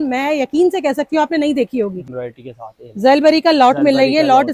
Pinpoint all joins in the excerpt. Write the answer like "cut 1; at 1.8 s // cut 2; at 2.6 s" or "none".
cut 1; at 2.0 s